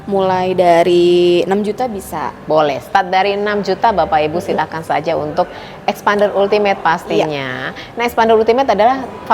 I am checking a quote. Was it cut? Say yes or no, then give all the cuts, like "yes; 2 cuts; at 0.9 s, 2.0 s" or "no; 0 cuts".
no; 0 cuts